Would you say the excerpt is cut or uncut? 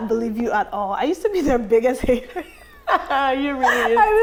uncut